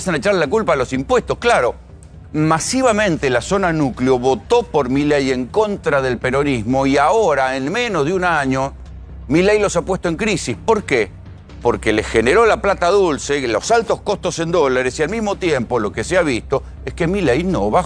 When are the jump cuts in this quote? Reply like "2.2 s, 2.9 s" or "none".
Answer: none